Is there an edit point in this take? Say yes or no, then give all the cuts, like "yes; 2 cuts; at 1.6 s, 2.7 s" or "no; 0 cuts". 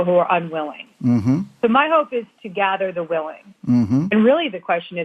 yes; 1 cut; at 4.1 s